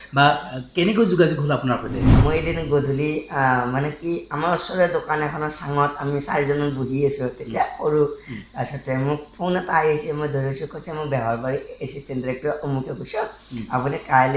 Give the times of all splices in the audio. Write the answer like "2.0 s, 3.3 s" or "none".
2.1 s